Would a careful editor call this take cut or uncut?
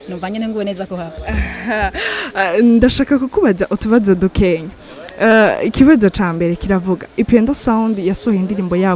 uncut